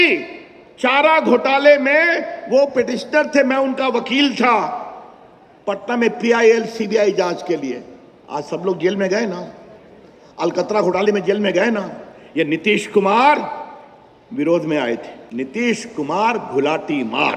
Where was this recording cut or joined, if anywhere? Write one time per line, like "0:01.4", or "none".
0:15.2